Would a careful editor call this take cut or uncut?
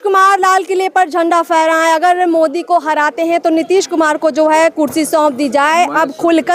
uncut